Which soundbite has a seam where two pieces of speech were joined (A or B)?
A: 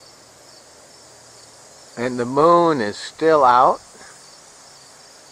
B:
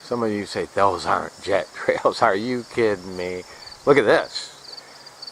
B